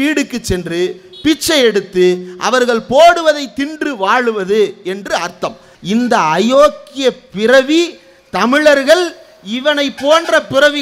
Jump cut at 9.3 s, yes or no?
no